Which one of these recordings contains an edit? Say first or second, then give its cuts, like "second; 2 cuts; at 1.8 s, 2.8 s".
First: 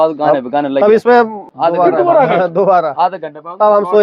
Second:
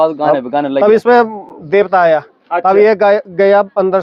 first; 1 cut; at 1.4 s